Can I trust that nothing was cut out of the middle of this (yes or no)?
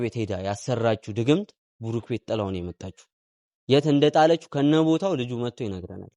yes